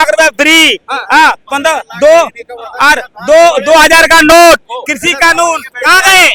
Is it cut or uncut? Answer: uncut